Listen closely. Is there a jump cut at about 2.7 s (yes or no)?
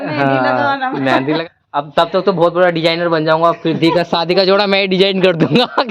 no